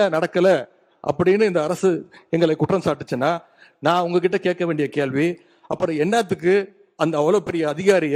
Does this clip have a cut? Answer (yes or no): no